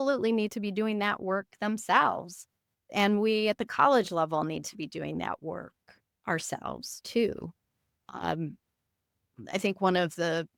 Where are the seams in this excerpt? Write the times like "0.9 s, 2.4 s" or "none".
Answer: none